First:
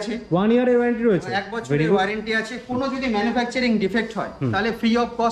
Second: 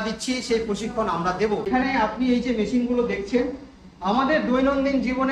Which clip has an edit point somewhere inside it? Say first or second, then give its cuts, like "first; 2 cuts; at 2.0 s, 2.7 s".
second; 1 cut; at 1.7 s